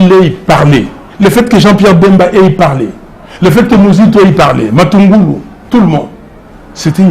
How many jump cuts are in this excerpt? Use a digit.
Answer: 1